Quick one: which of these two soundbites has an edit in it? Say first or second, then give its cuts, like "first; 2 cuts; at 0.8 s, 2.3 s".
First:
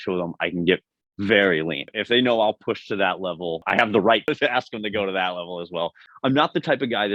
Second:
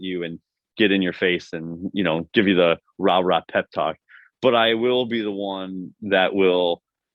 first; 4 cuts; at 1.8 s, 3.6 s, 4.3 s, 6.0 s